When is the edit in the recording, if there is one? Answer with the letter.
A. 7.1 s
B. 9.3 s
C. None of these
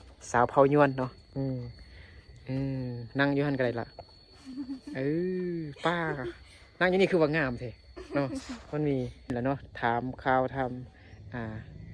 B